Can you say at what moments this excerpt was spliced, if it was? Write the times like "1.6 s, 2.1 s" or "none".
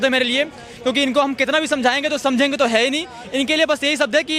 none

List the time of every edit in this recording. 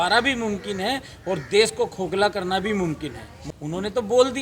3.4 s

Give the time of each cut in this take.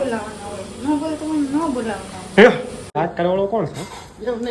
2.9 s

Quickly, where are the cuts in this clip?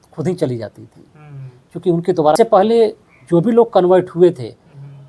2.4 s

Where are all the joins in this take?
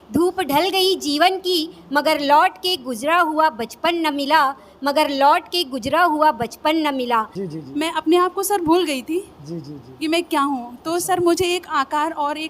7.4 s

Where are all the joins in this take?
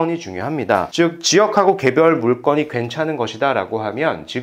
none

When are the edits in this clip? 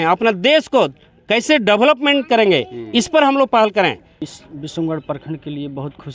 4.3 s

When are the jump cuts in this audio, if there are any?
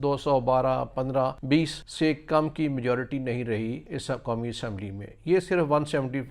1.6 s, 3.8 s

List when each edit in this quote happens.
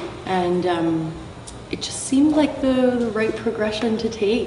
1.4 s

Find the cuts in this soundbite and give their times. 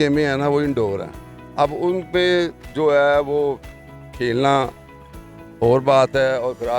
none

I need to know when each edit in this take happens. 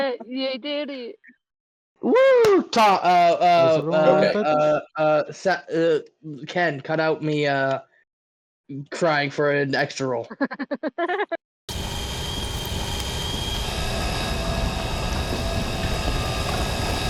none

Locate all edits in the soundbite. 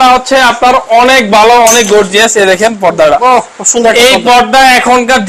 none

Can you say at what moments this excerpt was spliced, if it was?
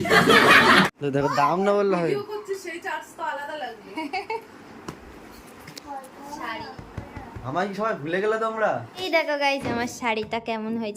1.0 s, 9.0 s

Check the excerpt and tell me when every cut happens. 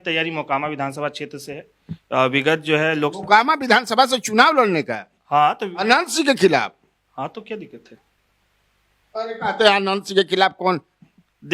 none

